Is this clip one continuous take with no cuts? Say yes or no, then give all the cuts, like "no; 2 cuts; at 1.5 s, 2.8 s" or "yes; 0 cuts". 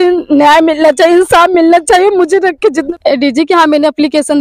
no; 1 cut; at 2.9 s